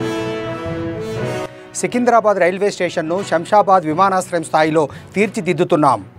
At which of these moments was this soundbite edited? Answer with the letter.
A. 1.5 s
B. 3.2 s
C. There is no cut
A